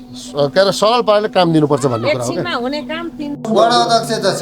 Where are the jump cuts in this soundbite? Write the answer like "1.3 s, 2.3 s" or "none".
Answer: 3.4 s